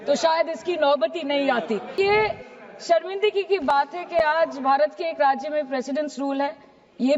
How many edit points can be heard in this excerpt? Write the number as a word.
one